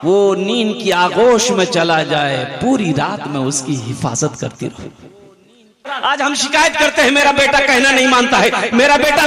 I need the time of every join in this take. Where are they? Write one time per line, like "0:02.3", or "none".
0:05.9

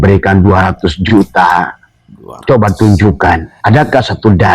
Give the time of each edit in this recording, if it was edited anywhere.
0:03.5

